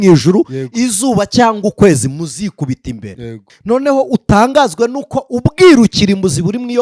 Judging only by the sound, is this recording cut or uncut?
cut